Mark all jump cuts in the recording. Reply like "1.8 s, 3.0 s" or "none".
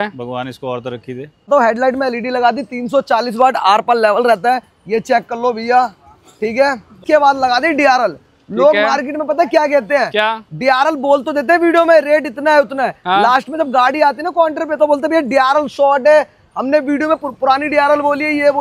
1.5 s, 7.0 s